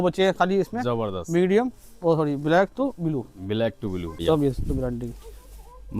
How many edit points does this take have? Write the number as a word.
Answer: one